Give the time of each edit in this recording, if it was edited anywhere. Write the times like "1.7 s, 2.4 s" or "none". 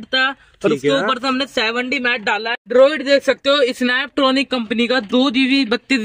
2.6 s